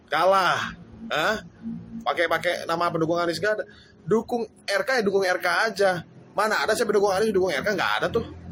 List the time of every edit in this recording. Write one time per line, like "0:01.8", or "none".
none